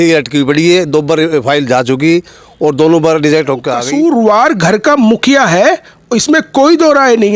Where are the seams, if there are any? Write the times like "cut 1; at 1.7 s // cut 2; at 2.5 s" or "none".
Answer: cut 1; at 3.8 s